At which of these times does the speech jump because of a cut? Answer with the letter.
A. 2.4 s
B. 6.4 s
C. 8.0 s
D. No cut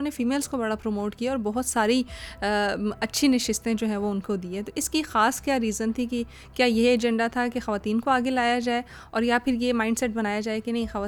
D